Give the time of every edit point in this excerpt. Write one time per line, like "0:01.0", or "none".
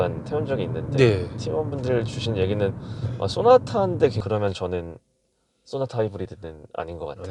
0:04.2